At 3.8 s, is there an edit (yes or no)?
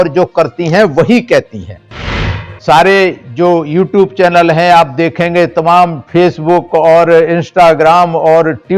no